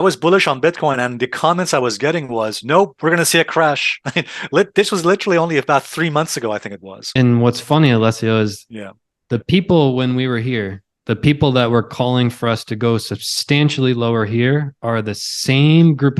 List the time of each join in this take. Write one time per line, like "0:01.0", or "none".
0:07.0